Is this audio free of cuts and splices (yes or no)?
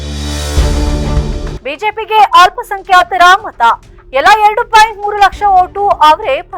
no